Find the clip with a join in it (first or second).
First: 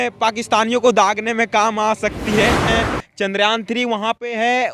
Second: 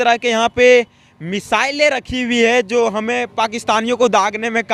first